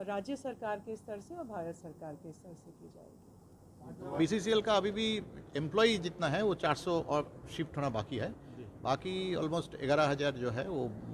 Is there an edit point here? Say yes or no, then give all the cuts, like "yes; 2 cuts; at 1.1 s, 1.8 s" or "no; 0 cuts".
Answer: yes; 1 cut; at 4.2 s